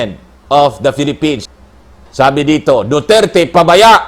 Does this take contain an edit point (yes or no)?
yes